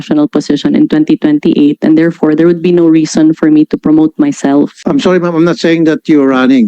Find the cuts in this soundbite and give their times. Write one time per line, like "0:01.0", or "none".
0:04.8